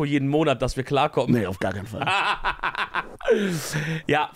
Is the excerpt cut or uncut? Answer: uncut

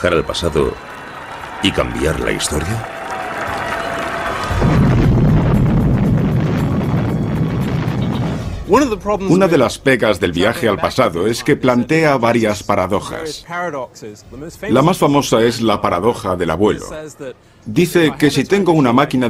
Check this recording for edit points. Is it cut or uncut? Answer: cut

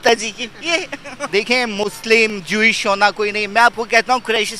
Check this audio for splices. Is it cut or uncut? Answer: cut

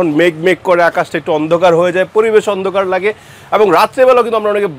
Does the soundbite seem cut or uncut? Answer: uncut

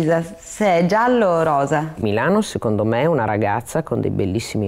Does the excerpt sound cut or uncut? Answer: cut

